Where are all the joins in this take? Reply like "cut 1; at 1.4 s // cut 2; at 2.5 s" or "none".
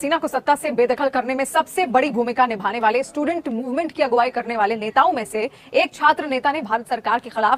none